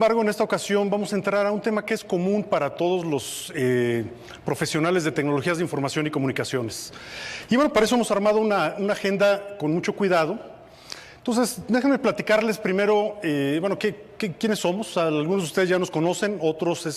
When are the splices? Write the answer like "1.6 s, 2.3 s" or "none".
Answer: 4.1 s